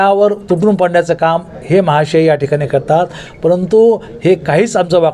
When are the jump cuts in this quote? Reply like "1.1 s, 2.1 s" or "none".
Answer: none